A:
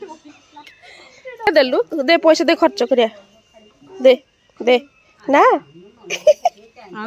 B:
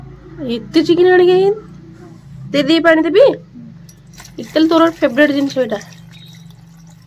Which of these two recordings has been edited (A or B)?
A